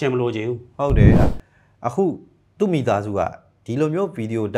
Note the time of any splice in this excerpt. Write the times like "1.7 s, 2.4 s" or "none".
1.1 s